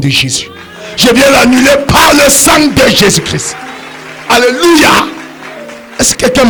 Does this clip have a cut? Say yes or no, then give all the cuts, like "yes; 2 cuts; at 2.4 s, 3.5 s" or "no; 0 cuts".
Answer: no; 0 cuts